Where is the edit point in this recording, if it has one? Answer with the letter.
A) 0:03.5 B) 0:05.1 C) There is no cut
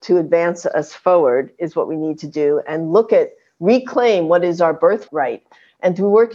B